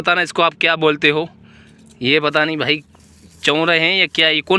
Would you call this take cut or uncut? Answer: uncut